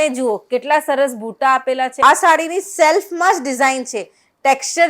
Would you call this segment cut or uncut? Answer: cut